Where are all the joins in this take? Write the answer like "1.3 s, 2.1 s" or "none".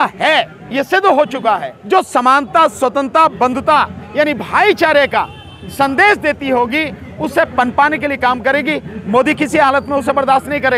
1.7 s